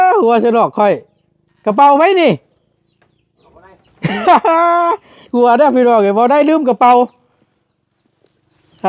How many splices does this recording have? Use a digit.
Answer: 0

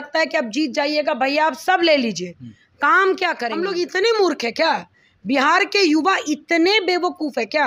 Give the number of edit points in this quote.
1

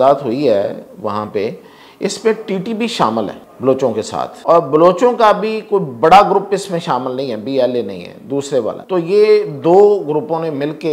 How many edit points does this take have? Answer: 3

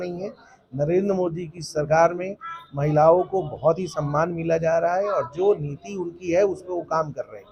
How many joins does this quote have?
0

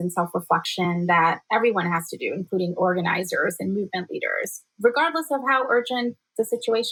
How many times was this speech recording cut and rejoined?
0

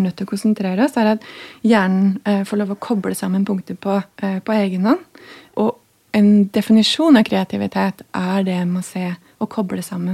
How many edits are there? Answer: 2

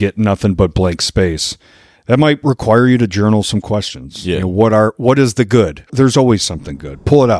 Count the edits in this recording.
1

